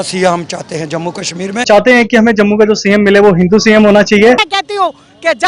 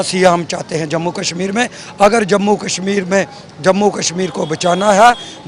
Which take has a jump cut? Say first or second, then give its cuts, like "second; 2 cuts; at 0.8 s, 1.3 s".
first; 2 cuts; at 1.6 s, 4.5 s